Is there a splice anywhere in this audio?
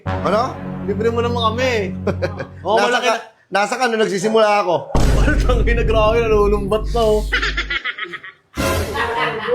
no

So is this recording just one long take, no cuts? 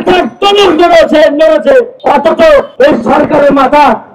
no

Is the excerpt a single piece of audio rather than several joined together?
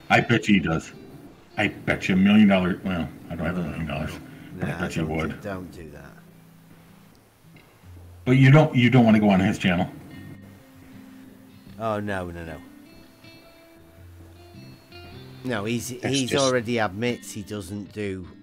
yes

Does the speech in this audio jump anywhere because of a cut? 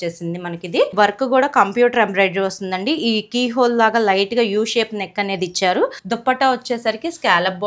yes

